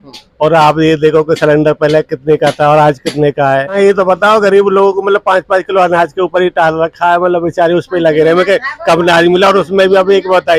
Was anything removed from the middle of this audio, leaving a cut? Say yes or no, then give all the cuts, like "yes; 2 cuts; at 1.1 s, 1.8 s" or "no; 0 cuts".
yes; 1 cut; at 3.7 s